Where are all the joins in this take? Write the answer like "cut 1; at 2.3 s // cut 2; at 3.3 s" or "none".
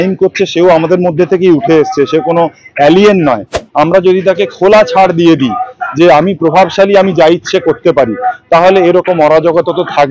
cut 1; at 3.5 s